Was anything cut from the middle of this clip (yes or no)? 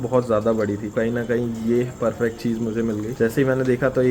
yes